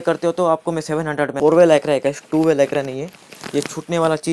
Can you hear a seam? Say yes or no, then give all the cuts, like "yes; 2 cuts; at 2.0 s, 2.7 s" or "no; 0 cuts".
yes; 1 cut; at 1.3 s